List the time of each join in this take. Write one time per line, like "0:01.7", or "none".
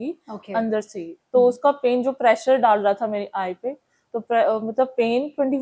none